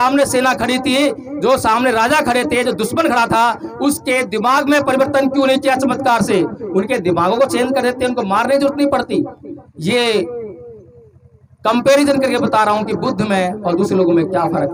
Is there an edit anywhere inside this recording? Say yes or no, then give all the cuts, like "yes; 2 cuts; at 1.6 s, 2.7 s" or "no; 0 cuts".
no; 0 cuts